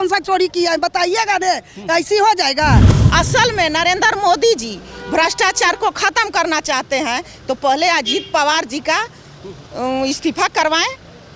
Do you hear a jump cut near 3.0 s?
yes; 1 cut; at 3.0 s

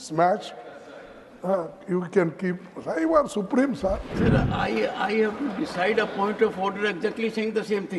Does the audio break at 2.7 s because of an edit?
no; 1 cut; at 4.1 s

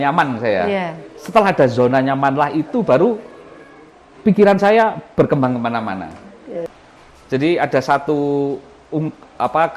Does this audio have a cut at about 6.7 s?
yes; 1 cut; at 6.7 s

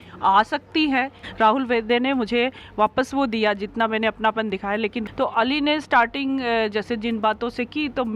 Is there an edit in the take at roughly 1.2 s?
yes; 2 cuts; at 1.2 s, 5.0 s

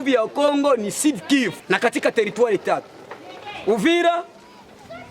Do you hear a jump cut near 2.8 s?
no; 1 cut; at 1.6 s

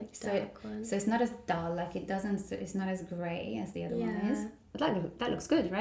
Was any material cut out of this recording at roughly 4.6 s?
yes; 1 cut; at 4.6 s

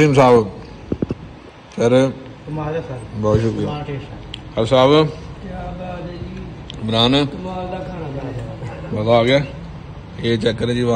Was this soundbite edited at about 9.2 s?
no; 0 cuts

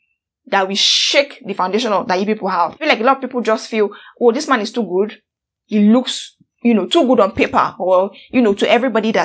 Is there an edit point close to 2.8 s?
yes; 1 cut; at 2.8 s

